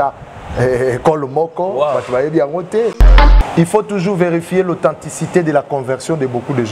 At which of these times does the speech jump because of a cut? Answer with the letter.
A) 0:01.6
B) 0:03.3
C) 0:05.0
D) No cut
B